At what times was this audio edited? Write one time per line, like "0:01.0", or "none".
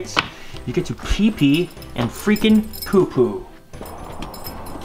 0:03.9